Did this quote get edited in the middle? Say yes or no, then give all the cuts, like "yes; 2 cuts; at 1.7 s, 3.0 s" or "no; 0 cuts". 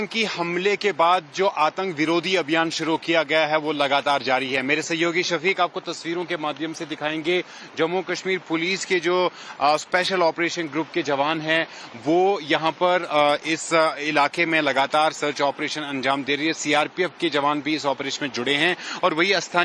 no; 0 cuts